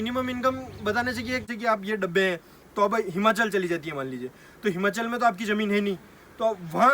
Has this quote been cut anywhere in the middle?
yes; 1 cut; at 1.5 s

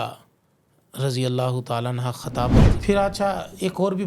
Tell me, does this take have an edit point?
yes; 1 cut; at 2.7 s

